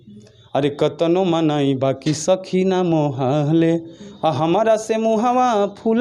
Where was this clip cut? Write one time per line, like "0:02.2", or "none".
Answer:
none

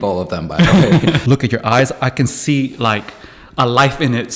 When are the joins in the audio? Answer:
0:01.2

